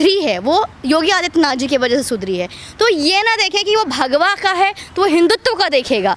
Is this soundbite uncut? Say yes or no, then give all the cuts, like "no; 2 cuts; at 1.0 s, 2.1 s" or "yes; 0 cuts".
yes; 0 cuts